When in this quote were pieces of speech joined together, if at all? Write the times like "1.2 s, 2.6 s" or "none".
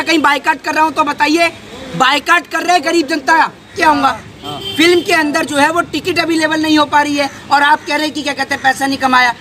3.7 s

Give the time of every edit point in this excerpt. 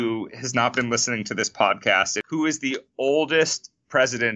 2.2 s

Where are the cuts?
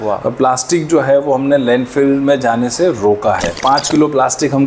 3.6 s

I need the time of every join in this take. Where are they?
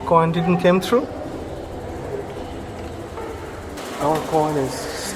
3.2 s

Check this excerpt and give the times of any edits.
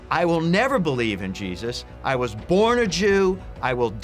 none

